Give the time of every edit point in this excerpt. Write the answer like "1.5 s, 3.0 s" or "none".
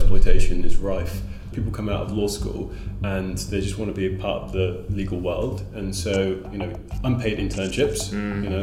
1.5 s